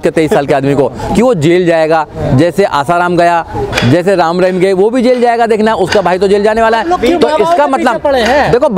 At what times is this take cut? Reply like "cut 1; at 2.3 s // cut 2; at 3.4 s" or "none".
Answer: none